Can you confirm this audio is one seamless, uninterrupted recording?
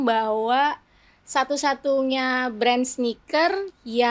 yes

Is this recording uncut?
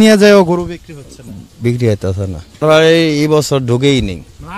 no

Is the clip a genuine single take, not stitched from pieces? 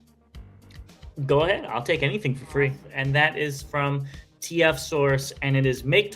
no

